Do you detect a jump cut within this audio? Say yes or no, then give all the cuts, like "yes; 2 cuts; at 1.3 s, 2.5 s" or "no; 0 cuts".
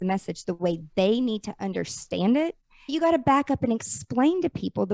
yes; 1 cut; at 2.9 s